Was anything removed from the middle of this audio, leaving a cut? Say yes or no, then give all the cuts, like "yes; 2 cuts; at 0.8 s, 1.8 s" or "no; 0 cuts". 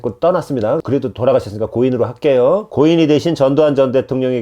yes; 2 cuts; at 0.8 s, 2.7 s